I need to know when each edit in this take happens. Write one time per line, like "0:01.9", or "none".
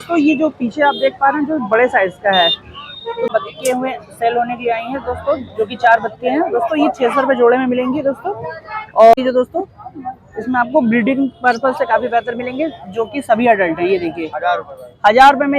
0:03.3
0:09.1
0:14.3